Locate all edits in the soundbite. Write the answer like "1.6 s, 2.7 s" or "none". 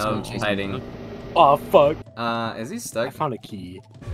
2.1 s